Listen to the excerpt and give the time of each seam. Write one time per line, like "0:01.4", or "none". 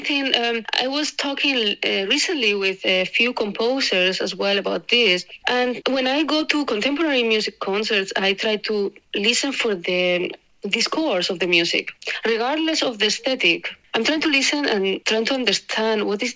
none